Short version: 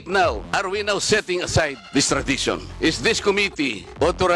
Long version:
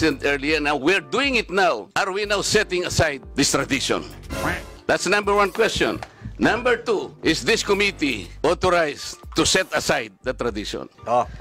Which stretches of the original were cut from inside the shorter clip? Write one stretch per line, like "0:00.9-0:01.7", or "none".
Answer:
0:04.1-0:07.1